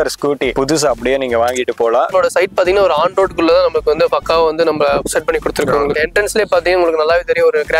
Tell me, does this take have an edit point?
yes; 2 cuts; at 2.1 s, 6.0 s

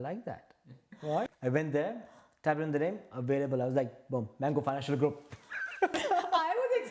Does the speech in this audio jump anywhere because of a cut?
yes; 2 cuts; at 1.3 s, 6.0 s

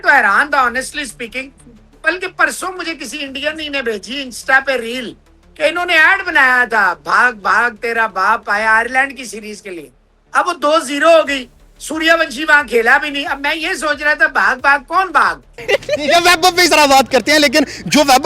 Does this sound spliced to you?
yes; 1 cut; at 15.6 s

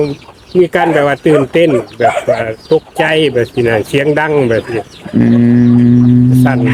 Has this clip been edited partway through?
no; 0 cuts

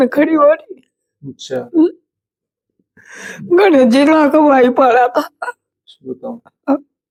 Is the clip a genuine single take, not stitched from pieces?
yes; 0 cuts

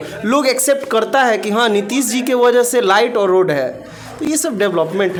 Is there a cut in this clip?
no; 0 cuts

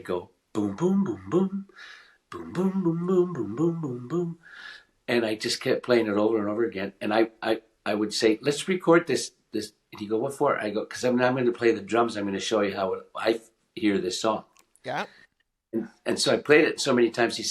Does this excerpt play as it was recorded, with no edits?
yes; 0 cuts

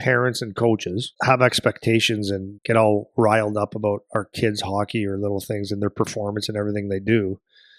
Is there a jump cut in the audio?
yes; 2 cuts; at 1.1 s, 2.5 s

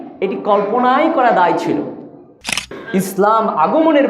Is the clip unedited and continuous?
no; 1 cut; at 2.6 s

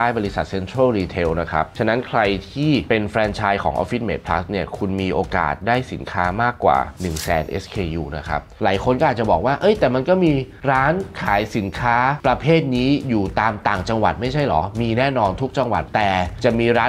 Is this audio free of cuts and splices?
no; 1 cut; at 8.5 s

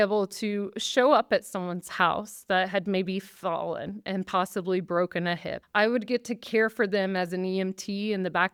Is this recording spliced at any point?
no; 0 cuts

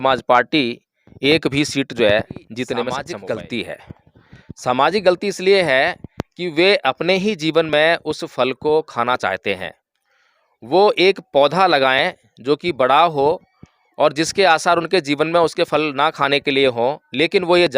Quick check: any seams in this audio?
yes; 1 cut; at 3.1 s

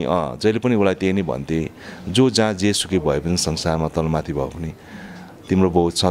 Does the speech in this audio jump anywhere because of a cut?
no; 0 cuts

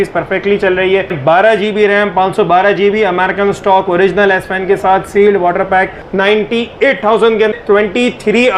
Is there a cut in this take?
yes; 3 cuts; at 1.2 s, 6.0 s, 7.5 s

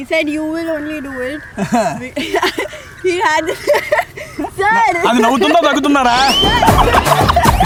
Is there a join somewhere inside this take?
no; 0 cuts

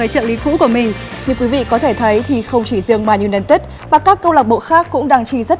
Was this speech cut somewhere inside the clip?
yes; 1 cut; at 1.1 s

